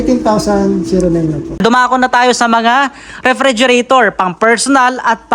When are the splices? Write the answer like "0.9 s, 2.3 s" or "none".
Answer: 1.6 s